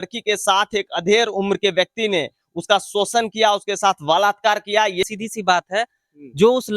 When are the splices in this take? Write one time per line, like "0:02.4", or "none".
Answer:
0:04.9